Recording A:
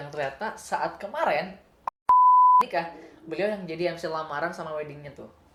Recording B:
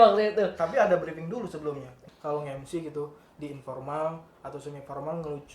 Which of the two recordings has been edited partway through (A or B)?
B